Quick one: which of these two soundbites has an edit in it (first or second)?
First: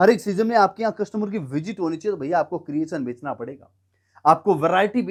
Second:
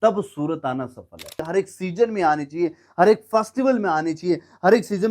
second